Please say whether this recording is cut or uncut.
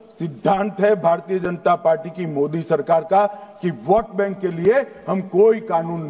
uncut